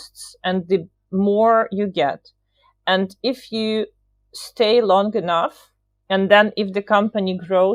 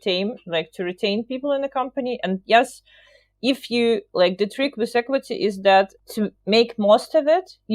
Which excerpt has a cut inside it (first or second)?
second